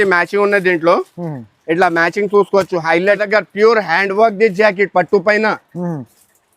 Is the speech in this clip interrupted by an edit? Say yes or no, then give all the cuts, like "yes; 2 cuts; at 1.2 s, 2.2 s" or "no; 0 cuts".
yes; 1 cut; at 3.2 s